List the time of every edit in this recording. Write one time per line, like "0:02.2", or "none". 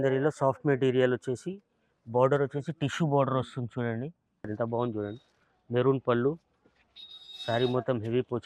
0:04.5